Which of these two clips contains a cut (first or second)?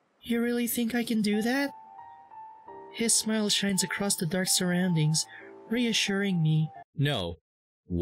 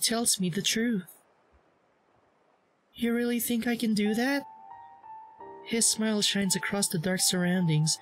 first